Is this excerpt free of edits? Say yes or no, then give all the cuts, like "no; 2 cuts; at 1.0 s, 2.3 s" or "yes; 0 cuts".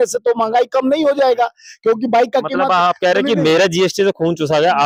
yes; 0 cuts